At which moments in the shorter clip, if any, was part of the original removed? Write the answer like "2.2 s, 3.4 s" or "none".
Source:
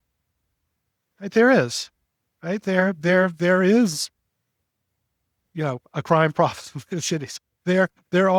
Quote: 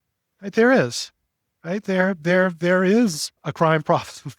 3.4 s